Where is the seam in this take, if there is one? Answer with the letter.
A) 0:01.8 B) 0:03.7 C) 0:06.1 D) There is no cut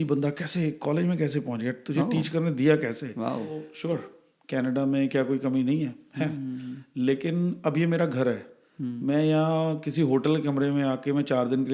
B